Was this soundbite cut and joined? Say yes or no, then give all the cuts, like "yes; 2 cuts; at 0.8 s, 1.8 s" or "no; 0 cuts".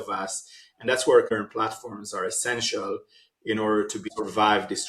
yes; 2 cuts; at 1.3 s, 4.1 s